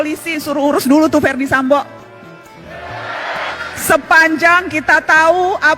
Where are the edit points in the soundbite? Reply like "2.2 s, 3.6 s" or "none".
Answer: 3.6 s